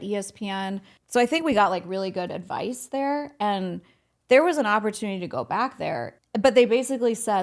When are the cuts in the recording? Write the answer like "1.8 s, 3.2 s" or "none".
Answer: 0.9 s, 6.2 s